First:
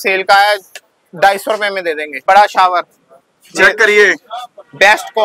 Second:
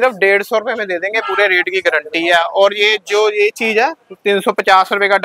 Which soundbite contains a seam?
first; 1 cut; at 2.2 s

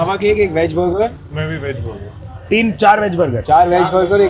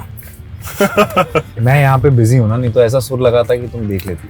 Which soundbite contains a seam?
second; 1 cut; at 1.5 s

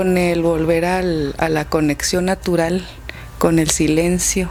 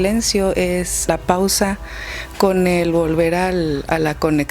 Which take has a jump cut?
second; 1 cut; at 1.1 s

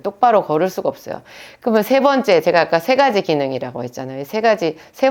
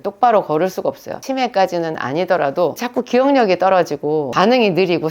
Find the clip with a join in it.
second; 3 cuts; at 1.1 s, 2.8 s, 4.3 s

